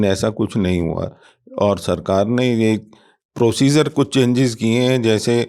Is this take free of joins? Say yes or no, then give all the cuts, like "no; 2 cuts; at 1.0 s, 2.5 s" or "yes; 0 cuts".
yes; 0 cuts